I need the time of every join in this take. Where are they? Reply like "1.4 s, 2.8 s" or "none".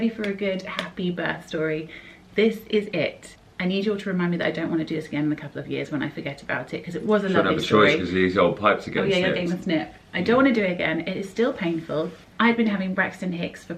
none